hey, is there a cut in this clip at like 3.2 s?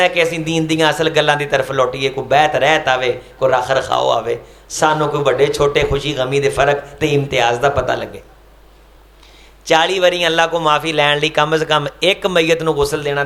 no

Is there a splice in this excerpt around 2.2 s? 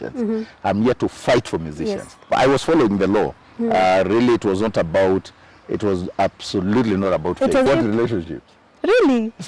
yes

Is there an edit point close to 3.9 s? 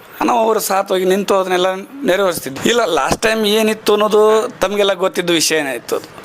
no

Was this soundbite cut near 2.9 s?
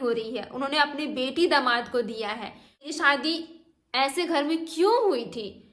yes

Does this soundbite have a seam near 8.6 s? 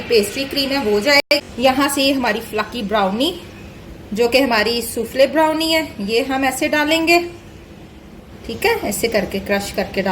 no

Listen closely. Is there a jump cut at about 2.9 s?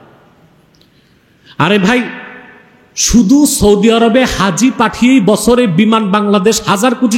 no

